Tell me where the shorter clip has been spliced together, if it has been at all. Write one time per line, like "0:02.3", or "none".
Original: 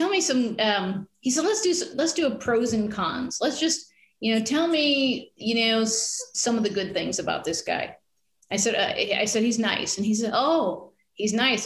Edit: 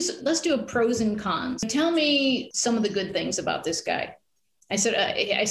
0:01.7
0:02.5